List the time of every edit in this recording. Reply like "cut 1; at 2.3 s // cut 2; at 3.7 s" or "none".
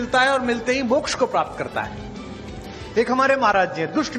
cut 1; at 1.3 s